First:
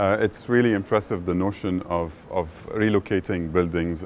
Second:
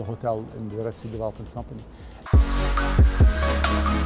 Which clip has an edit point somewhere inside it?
second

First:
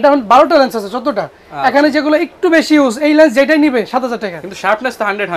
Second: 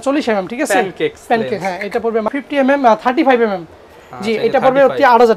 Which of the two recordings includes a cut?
second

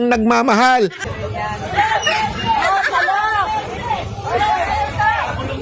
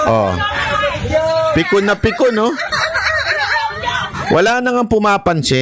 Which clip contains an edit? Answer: first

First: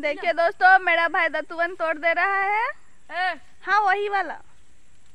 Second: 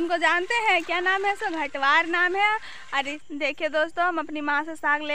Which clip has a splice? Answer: second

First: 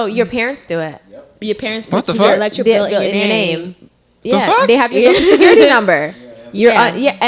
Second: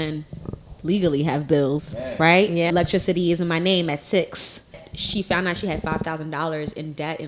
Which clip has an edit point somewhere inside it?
second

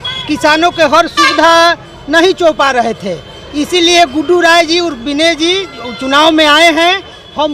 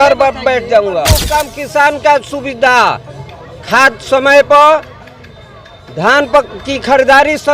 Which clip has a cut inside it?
second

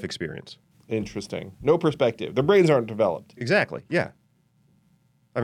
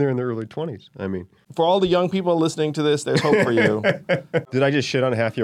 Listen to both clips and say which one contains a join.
second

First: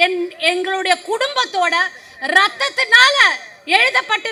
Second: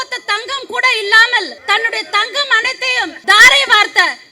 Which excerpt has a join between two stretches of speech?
second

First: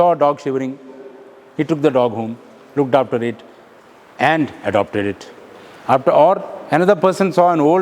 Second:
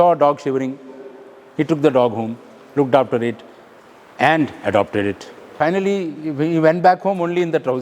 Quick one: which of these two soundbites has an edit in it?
second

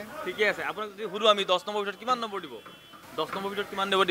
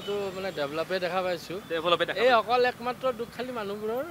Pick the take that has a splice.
second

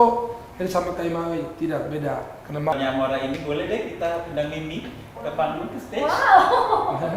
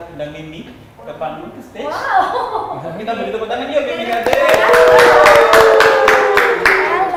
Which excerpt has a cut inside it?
first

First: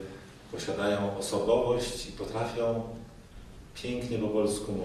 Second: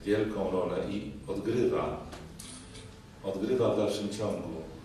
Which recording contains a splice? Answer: first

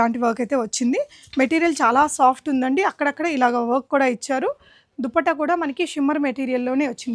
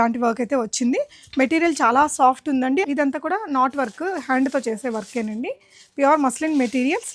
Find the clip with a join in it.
second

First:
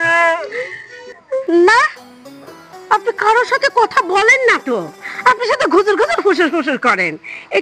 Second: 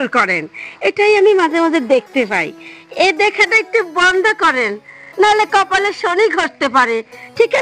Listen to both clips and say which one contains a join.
first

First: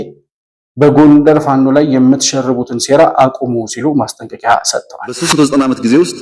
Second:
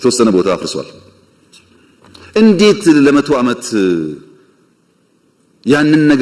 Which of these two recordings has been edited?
first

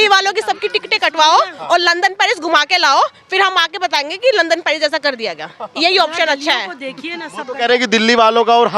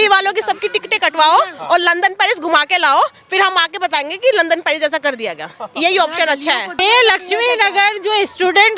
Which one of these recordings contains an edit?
second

